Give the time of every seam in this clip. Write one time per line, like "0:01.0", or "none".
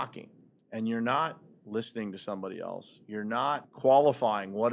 0:03.7